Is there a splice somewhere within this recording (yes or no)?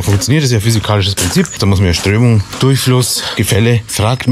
yes